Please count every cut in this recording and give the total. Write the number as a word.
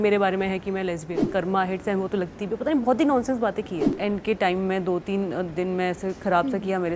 two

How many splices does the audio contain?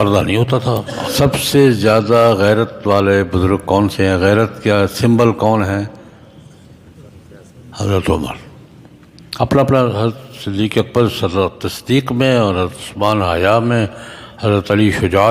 one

